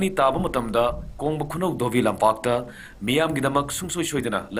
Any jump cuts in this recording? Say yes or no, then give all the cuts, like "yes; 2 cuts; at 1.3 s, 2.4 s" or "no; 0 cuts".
no; 0 cuts